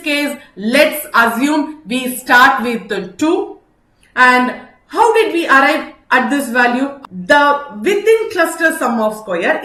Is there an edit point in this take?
no; 0 cuts

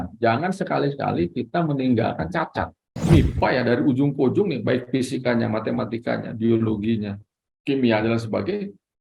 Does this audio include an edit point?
yes; 1 cut; at 2.9 s

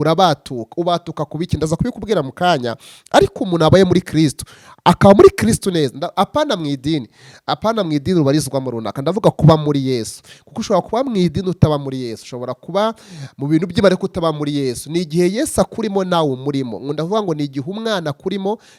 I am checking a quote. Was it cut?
no; 0 cuts

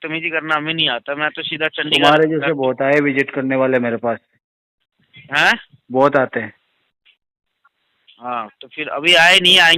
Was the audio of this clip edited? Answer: no; 0 cuts

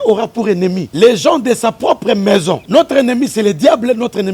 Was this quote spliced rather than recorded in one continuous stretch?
yes; 2 cuts; at 0.8 s, 2.6 s

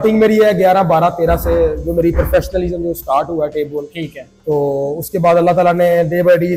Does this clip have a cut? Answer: no; 0 cuts

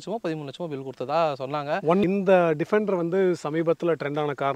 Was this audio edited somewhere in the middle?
yes; 1 cut; at 2.0 s

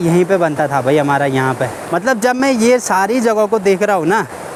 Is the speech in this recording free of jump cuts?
yes; 0 cuts

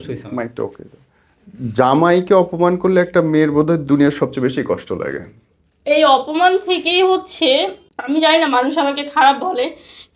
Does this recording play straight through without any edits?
no; 1 cut; at 7.9 s

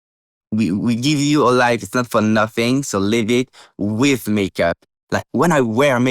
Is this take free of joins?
no; 1 cut; at 4.9 s

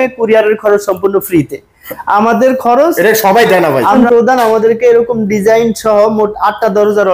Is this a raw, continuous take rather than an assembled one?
no; 1 cut; at 4.0 s

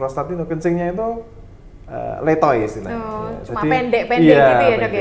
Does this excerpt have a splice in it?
no; 0 cuts

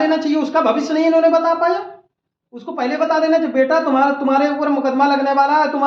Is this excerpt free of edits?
yes; 0 cuts

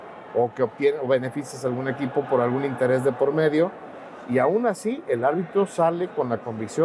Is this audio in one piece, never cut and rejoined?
yes; 0 cuts

